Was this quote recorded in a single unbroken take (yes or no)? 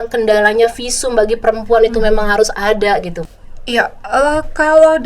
no